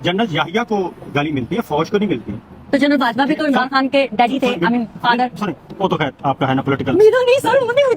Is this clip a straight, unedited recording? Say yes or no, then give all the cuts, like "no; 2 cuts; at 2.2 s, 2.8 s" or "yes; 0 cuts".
yes; 0 cuts